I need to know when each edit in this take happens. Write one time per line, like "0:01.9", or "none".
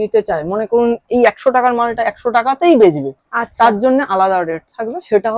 none